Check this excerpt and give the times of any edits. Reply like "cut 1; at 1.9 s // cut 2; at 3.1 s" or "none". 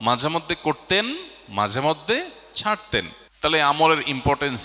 cut 1; at 3.2 s